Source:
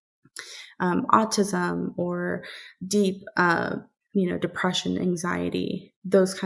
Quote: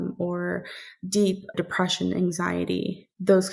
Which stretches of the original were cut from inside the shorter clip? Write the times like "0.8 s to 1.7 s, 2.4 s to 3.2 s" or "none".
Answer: 3.3 s to 4.4 s